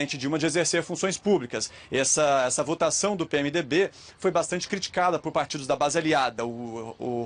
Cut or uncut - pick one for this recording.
cut